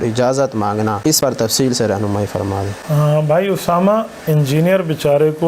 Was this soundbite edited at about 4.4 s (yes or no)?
no